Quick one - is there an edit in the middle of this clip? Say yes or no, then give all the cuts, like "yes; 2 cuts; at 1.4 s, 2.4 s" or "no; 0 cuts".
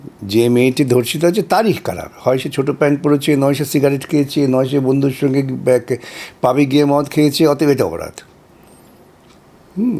no; 0 cuts